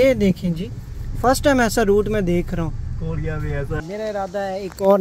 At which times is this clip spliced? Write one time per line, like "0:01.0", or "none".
0:03.8